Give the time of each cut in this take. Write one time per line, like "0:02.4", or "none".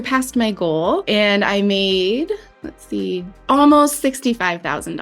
0:01.0
0:03.3